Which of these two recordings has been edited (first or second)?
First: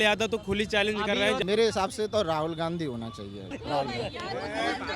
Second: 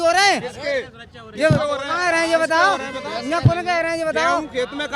first